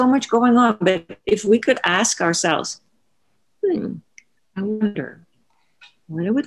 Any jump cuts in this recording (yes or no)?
no